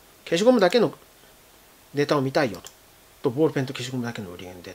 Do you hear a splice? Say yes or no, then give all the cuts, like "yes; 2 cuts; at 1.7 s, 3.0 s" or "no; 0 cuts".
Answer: no; 0 cuts